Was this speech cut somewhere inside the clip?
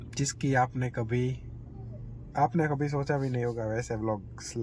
no; 0 cuts

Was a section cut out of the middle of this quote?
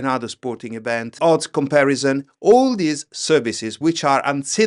yes; 1 cut; at 1.2 s

